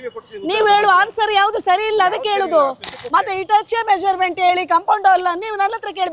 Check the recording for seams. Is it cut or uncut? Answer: cut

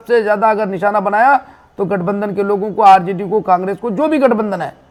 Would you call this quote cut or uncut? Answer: uncut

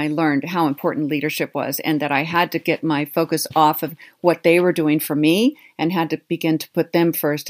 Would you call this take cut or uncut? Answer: uncut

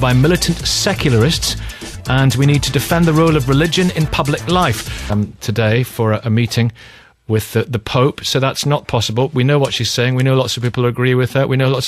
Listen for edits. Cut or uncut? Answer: uncut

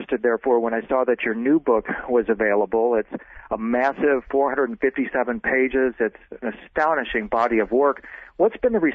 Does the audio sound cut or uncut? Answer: cut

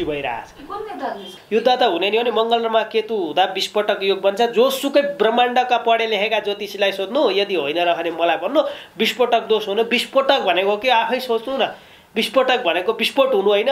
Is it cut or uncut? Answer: cut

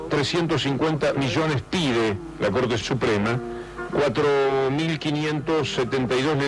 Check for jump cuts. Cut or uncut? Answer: uncut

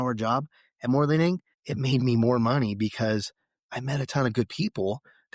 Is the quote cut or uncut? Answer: uncut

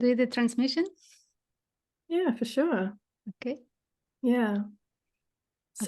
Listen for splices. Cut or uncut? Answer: uncut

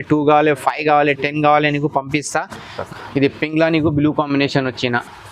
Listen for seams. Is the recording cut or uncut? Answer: cut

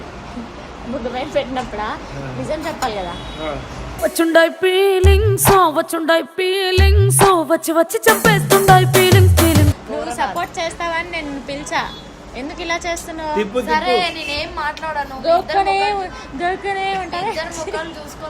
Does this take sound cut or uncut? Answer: cut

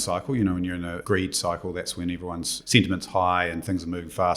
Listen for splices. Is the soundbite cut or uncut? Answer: cut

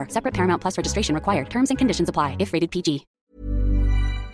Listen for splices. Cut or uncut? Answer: cut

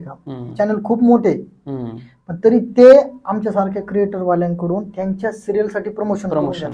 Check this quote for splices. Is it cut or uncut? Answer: uncut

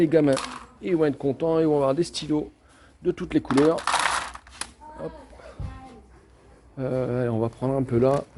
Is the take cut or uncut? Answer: uncut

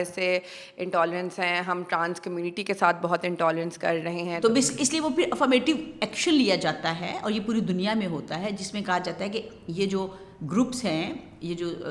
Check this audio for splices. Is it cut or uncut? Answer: cut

